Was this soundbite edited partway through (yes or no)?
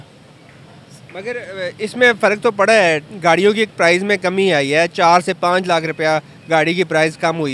no